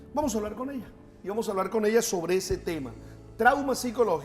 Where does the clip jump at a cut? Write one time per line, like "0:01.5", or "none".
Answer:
0:02.1